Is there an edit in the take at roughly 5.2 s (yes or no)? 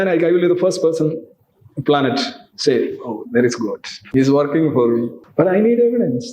yes